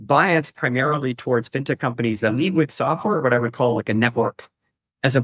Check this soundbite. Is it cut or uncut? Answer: uncut